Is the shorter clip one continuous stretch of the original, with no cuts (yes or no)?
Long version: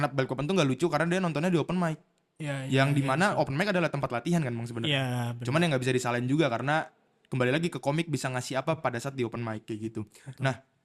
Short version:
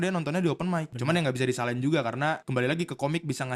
no